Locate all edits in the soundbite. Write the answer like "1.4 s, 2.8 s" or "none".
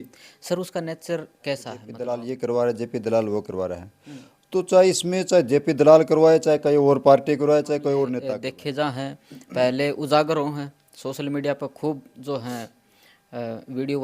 1.9 s, 8.3 s